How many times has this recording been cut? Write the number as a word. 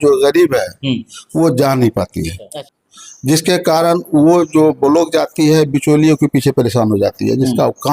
one